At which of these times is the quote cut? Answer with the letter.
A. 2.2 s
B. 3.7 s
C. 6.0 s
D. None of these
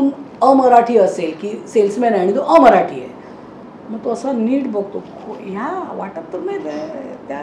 D